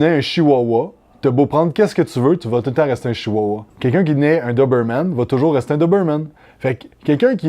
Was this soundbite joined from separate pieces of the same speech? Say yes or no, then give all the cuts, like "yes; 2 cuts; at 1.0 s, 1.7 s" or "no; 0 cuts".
yes; 1 cut; at 3.7 s